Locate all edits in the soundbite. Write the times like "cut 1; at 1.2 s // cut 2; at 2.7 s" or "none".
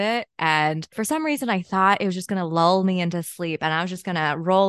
cut 1; at 1.0 s